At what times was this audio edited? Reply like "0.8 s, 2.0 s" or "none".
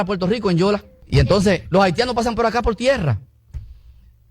3.2 s